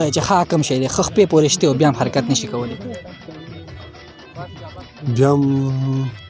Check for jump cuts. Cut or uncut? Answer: uncut